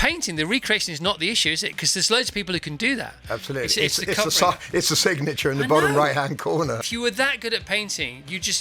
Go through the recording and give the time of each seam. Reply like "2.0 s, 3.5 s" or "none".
6.8 s